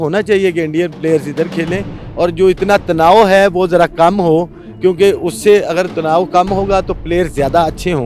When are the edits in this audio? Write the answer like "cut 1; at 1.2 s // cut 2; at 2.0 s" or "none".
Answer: none